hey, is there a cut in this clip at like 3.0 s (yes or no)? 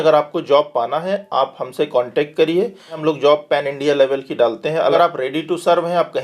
yes